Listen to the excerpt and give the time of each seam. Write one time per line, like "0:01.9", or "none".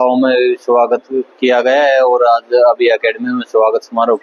none